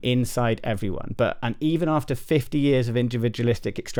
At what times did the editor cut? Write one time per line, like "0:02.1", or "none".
none